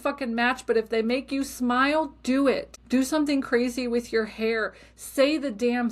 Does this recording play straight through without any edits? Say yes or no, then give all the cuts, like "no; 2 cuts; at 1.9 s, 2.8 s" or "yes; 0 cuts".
no; 1 cut; at 2.7 s